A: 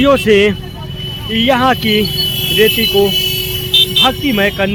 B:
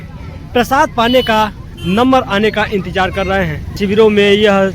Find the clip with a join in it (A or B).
B